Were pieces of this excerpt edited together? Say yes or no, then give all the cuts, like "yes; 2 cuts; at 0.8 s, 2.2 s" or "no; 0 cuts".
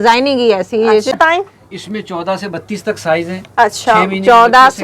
yes; 1 cut; at 1.2 s